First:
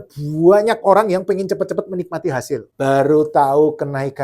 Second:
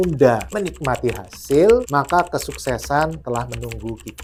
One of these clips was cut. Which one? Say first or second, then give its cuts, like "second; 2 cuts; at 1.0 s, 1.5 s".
first; 1 cut; at 2.7 s